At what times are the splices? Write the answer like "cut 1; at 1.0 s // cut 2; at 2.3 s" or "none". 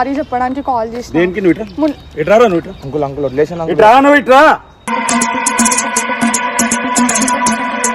none